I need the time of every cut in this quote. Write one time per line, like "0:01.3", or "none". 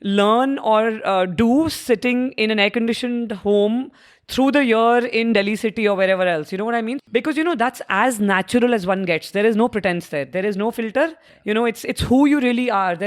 0:07.0
0:11.3